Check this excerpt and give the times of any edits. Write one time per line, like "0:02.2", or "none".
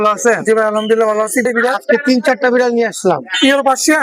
0:01.4